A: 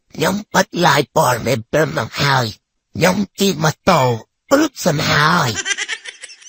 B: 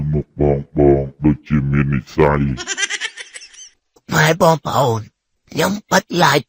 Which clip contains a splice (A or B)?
B